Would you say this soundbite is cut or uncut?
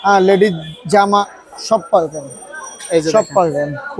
uncut